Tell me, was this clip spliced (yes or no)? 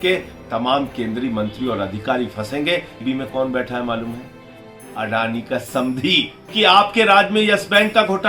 yes